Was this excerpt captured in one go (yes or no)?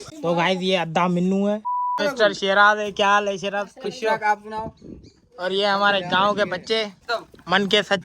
no